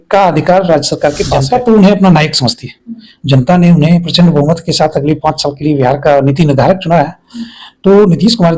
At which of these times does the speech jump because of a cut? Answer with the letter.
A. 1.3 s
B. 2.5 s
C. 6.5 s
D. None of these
A